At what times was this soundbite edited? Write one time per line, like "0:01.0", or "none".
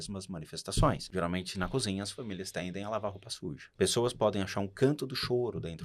0:01.0
0:03.6